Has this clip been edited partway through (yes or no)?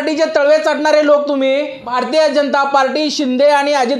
yes